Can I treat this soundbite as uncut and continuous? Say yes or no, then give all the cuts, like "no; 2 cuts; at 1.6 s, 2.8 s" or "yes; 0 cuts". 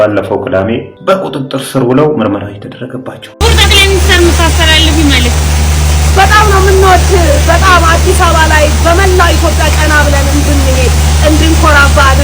no; 2 cuts; at 0.9 s, 3.2 s